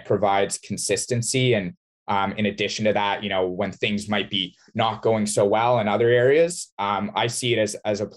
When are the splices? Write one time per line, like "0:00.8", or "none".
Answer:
none